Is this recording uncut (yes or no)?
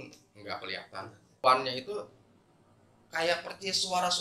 no